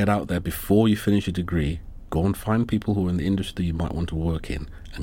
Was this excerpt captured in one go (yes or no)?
yes